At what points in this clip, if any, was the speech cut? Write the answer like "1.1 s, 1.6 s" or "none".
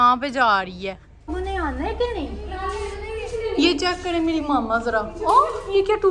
1.3 s